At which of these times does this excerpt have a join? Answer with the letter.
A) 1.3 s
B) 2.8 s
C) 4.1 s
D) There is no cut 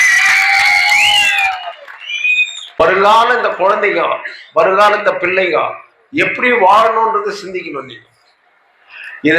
B